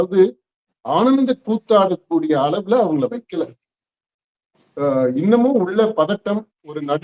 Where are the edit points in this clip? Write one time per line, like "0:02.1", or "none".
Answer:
none